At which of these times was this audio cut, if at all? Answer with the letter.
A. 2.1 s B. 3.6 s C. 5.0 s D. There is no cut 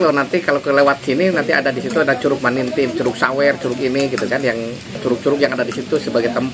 C